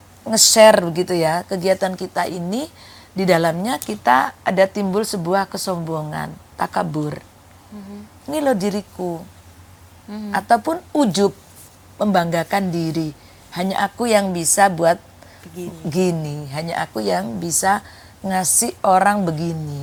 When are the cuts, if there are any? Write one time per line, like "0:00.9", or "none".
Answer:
none

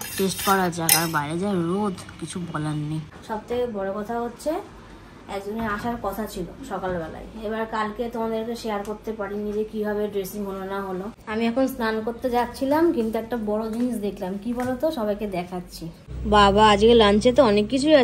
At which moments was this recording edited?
0:03.1
0:11.2
0:16.1

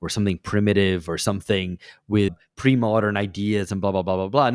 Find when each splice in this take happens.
none

